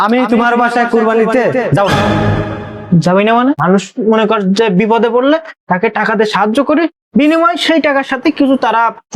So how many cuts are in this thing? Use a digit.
1